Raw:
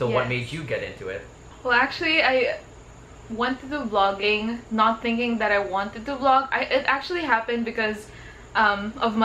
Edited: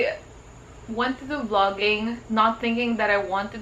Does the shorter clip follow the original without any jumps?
yes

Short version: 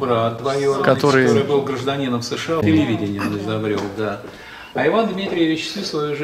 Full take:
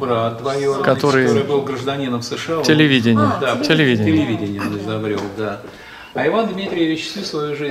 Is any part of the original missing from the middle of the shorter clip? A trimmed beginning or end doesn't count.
yes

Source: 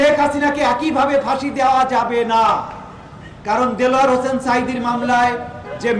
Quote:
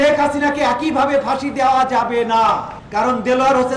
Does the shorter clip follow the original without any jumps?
no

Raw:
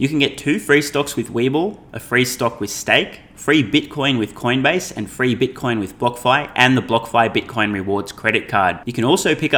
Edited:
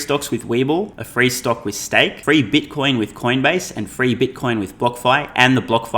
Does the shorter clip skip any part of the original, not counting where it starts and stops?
yes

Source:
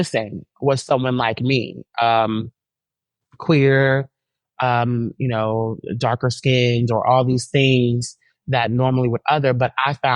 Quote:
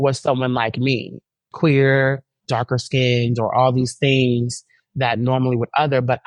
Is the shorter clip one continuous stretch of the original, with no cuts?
no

